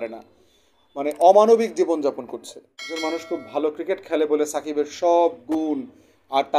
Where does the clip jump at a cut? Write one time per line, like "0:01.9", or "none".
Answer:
0:02.9